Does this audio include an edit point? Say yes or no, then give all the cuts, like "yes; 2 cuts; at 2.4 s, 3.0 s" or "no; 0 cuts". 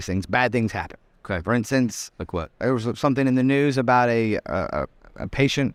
no; 0 cuts